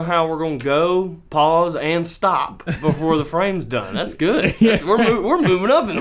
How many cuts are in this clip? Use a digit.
0